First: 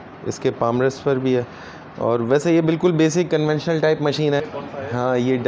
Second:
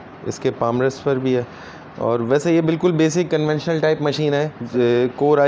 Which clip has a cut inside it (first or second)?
first